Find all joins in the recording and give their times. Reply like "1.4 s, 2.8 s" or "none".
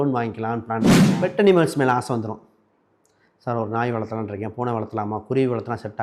1.0 s